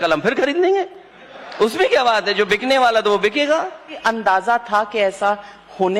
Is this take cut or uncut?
cut